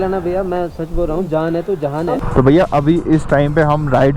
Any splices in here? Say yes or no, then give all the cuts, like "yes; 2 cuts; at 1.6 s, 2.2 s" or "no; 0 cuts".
yes; 1 cut; at 2.2 s